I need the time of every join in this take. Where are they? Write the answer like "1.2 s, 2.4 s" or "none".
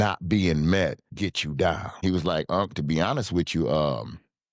1.0 s, 2.0 s

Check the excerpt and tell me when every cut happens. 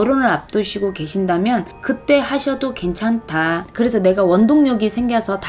3.7 s

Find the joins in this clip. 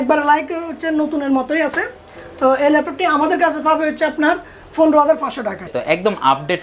5.7 s

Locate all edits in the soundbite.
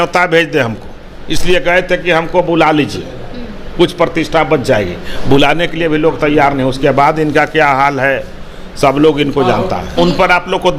9.9 s

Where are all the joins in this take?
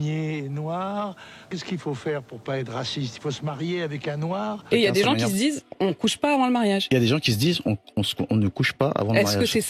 1.5 s, 4.7 s

